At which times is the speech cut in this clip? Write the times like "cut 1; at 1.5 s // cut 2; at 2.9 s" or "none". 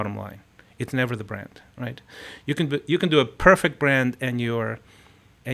none

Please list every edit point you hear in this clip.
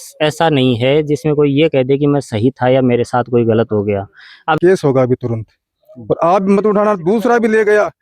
cut 1; at 4.6 s

